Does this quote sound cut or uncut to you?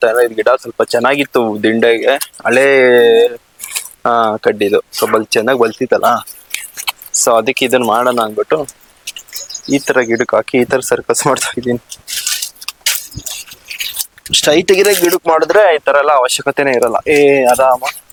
uncut